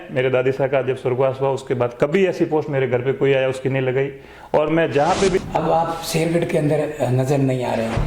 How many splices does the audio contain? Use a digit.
1